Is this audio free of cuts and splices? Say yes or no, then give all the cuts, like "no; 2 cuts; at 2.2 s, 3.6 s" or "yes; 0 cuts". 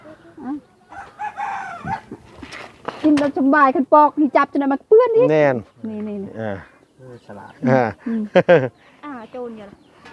yes; 0 cuts